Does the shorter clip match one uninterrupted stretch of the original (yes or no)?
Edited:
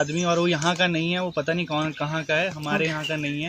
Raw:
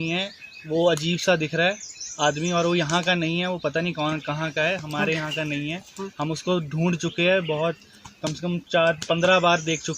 yes